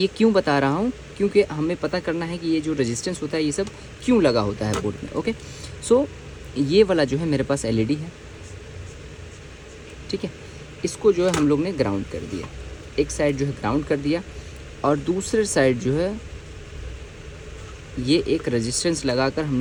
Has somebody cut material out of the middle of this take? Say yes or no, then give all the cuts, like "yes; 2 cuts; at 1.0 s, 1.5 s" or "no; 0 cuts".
no; 0 cuts